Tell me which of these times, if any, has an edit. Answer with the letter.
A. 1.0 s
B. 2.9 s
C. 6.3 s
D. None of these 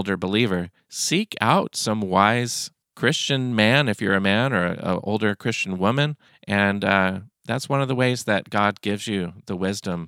D